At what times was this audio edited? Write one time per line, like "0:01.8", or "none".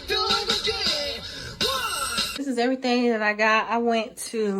0:02.4